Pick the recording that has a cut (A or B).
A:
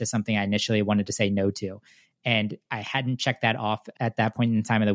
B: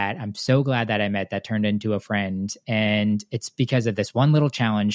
A